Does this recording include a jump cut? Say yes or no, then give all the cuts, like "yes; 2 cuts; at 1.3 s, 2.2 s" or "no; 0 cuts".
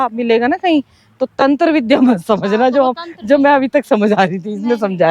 no; 0 cuts